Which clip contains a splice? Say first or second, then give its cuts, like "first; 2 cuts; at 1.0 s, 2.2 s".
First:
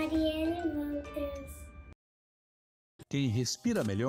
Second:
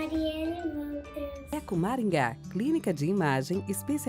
second; 1 cut; at 1.5 s